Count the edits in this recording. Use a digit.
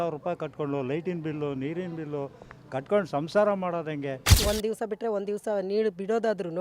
1